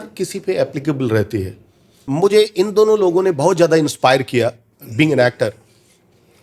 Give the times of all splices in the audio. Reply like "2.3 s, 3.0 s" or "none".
2.0 s